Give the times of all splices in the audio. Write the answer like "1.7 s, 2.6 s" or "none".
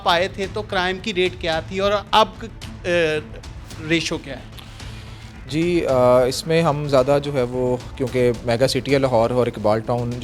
none